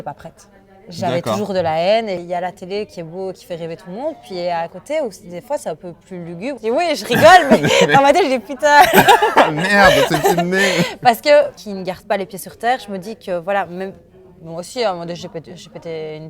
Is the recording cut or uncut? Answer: cut